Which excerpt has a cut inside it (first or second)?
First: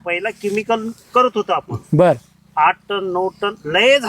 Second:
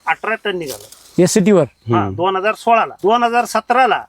second